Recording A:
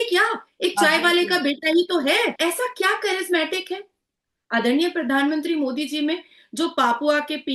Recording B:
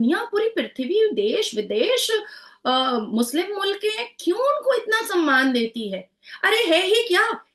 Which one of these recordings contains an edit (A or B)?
A